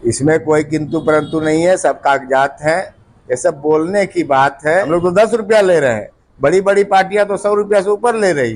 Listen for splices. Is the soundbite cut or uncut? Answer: cut